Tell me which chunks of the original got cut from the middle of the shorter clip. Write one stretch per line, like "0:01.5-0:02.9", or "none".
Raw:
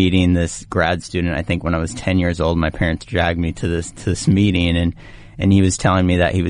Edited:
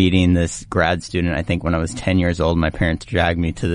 none